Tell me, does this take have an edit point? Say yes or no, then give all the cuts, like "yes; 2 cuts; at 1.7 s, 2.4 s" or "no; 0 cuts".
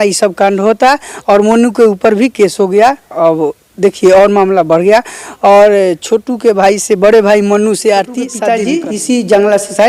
yes; 1 cut; at 8.4 s